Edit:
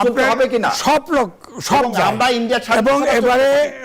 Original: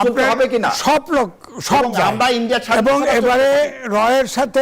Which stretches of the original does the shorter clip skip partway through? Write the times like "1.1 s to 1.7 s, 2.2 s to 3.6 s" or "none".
none